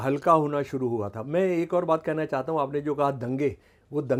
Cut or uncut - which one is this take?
uncut